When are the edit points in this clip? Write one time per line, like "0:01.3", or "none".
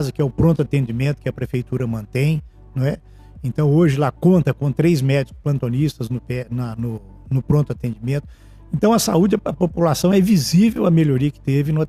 none